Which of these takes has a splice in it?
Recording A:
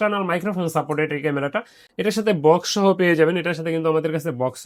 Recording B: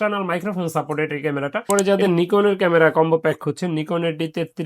B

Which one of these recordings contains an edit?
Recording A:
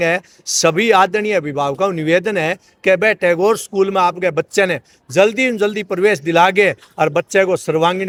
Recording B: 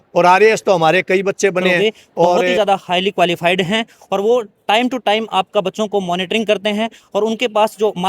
B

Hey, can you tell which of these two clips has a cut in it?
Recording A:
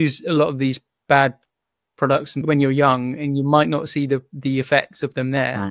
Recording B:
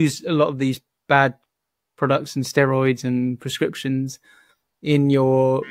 A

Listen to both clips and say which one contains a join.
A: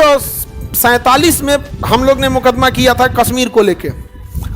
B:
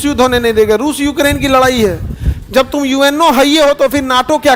A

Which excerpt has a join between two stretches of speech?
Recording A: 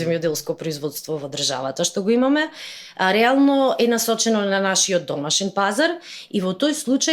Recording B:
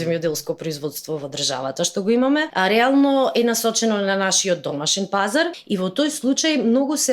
B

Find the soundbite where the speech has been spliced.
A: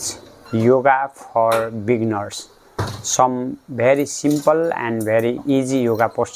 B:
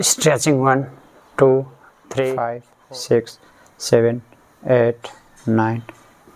B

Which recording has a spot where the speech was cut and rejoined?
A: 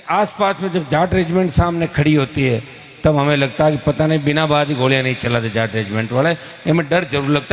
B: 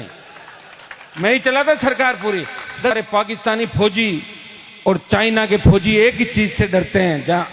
B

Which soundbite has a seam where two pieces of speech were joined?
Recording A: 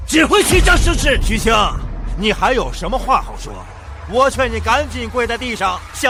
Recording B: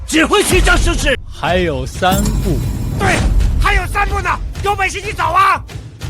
B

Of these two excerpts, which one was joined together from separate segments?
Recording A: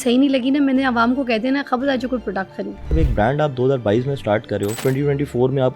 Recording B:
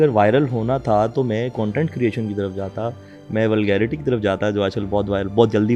A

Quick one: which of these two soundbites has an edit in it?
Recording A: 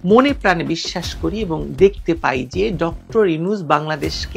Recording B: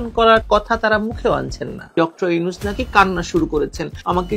B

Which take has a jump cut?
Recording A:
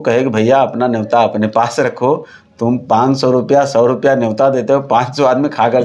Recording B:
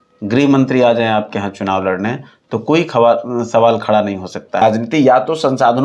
B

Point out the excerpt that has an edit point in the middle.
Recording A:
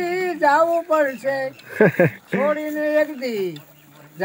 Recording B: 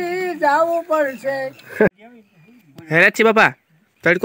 B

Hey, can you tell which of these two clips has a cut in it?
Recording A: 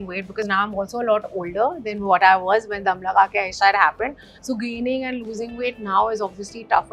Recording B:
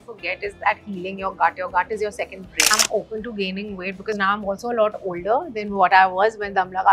B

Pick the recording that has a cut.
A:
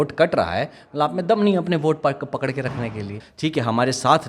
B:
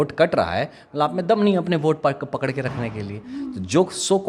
A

